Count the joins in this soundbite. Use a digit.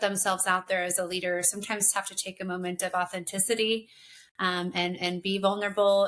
0